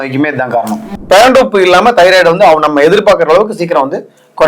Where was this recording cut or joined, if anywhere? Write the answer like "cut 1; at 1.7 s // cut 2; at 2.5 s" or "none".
cut 1; at 0.9 s